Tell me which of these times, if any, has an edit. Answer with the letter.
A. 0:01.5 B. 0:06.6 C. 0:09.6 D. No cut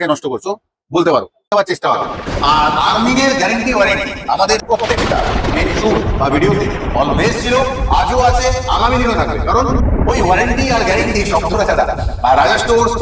A